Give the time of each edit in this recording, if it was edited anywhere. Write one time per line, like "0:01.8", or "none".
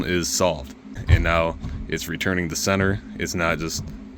0:01.0